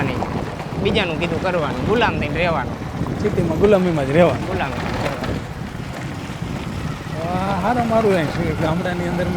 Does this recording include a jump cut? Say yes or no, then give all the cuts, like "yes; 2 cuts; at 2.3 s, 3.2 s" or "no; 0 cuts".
no; 0 cuts